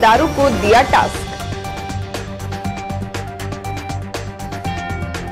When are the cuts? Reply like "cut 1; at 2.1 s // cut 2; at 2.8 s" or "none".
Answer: none